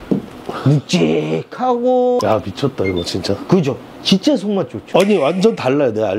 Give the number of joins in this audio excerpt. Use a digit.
1